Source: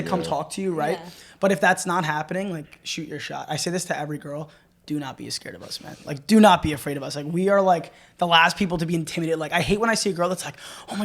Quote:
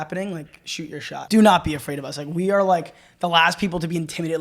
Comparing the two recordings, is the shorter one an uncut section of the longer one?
no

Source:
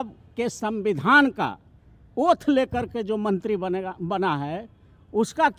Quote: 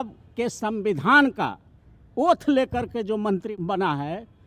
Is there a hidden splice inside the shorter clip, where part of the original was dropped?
yes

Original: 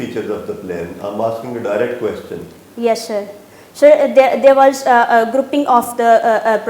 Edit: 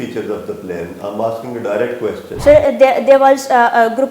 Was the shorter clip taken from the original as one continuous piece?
no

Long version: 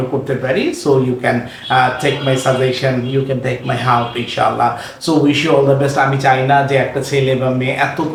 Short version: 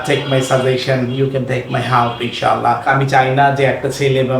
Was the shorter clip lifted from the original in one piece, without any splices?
no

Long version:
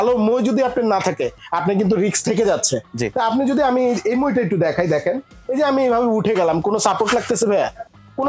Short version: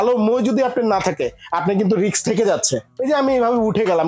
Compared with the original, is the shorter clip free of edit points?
no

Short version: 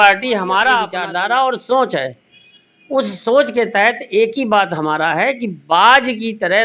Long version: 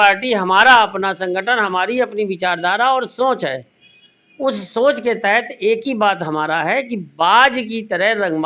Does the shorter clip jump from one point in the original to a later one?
yes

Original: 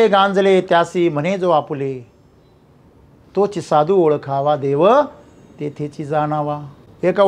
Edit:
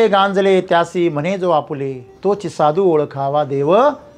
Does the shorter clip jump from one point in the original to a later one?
yes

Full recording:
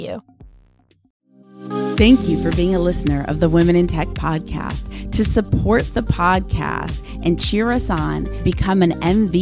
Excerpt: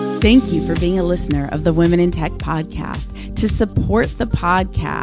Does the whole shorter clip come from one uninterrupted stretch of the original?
yes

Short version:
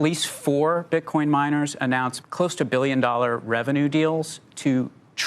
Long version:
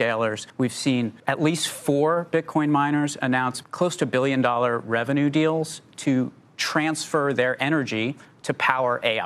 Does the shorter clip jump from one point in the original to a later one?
no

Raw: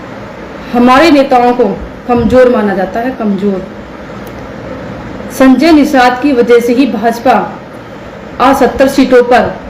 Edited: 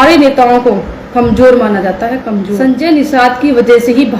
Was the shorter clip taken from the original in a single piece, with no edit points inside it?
no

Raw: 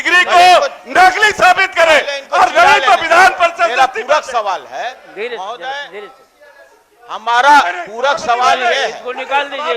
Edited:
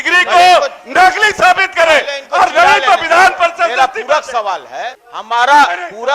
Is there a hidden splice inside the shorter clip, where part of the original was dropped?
yes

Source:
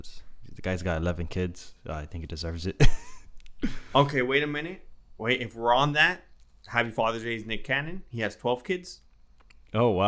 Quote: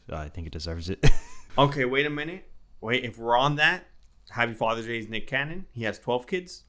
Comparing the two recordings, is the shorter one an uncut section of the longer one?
no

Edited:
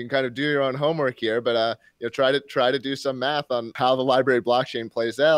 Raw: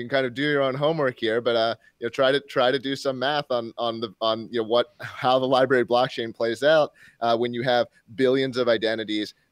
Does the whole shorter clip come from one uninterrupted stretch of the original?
no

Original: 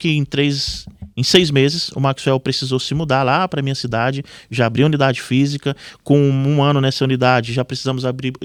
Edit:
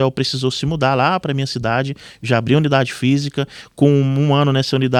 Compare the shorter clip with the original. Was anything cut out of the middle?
no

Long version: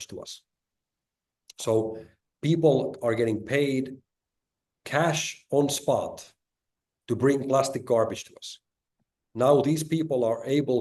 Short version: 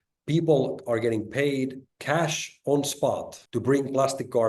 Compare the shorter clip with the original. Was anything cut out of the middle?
yes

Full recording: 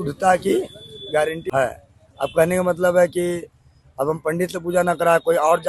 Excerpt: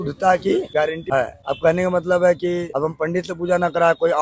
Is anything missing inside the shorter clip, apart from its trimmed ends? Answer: yes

